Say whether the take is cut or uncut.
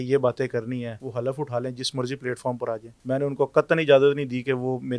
cut